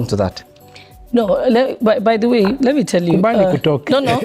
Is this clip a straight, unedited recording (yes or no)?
no